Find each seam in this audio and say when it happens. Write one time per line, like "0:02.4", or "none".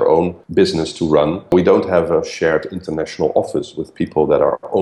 0:01.5